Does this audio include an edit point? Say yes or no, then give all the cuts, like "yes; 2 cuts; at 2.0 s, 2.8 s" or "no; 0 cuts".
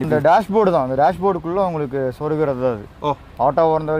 no; 0 cuts